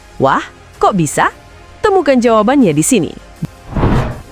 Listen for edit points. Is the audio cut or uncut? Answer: cut